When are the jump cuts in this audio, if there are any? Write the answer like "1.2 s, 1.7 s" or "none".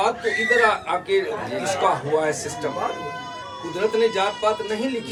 none